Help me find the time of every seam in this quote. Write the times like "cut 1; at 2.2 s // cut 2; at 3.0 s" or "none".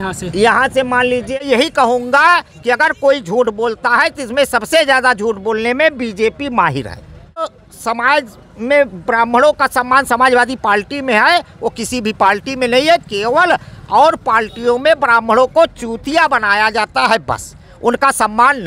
cut 1; at 1.3 s // cut 2; at 7.6 s